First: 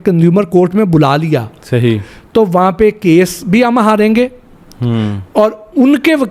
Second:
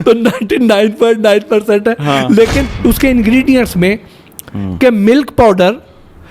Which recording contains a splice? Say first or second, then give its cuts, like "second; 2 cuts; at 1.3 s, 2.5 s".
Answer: second; 1 cut; at 2.7 s